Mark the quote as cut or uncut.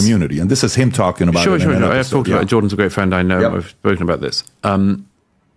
uncut